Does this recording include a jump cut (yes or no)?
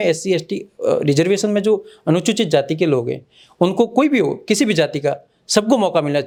no